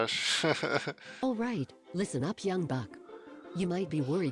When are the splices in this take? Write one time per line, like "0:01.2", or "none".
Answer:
0:01.2